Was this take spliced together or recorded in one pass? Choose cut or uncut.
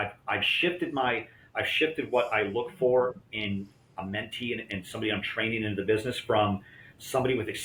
uncut